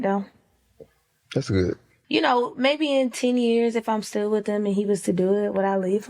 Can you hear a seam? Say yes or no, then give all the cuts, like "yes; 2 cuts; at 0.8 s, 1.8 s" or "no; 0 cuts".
yes; 1 cut; at 1.9 s